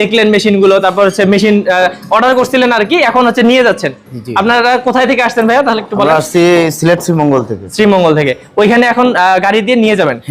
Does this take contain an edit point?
no; 0 cuts

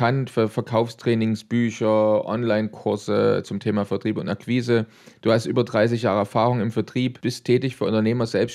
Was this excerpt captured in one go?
yes; 0 cuts

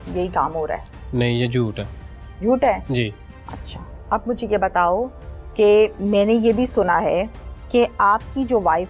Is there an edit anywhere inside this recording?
no; 0 cuts

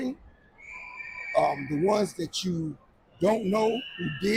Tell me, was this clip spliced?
no; 0 cuts

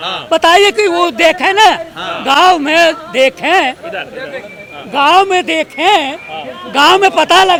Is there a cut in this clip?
no; 0 cuts

